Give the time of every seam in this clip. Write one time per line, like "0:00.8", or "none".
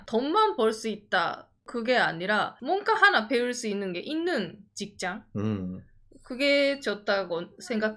0:02.5